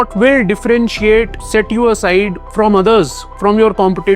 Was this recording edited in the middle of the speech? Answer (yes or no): yes